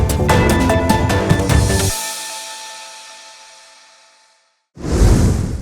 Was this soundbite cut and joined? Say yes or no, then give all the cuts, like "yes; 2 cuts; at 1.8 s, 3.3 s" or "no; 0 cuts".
yes; 1 cut; at 4.7 s